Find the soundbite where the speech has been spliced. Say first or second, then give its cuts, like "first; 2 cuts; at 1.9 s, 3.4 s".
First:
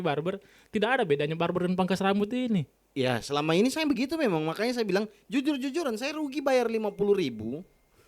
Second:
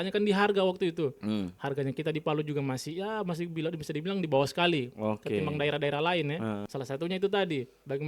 second; 1 cut; at 6.7 s